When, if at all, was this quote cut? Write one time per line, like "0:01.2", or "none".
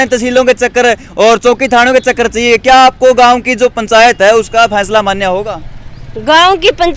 none